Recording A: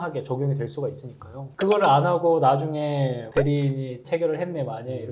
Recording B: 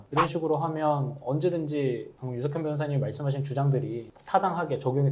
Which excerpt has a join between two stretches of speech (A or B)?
A